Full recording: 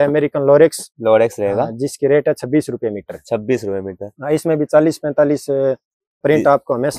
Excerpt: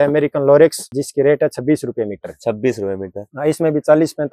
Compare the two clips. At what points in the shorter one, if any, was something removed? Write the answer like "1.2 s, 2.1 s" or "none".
0.9 s